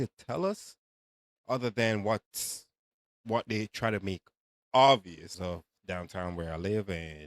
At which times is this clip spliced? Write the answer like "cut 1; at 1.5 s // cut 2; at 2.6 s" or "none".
cut 1; at 5.3 s